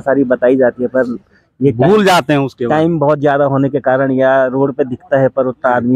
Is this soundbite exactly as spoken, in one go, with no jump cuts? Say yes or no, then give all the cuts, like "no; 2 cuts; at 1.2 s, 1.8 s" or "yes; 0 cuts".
yes; 0 cuts